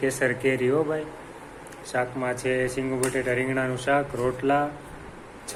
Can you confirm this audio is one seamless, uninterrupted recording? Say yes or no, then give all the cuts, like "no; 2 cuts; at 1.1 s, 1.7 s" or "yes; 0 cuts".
yes; 0 cuts